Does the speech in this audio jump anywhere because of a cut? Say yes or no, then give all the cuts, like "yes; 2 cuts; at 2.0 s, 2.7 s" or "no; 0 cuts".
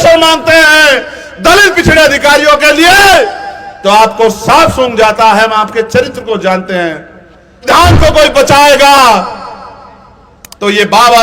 yes; 1 cut; at 7.6 s